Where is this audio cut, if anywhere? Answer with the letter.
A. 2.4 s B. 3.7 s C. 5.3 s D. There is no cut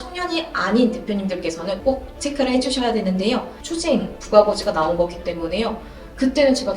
B